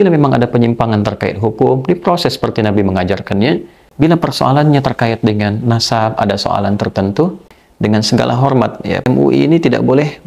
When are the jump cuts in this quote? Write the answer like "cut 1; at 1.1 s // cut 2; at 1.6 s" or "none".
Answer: cut 1; at 3.8 s // cut 2; at 7.4 s // cut 3; at 9.0 s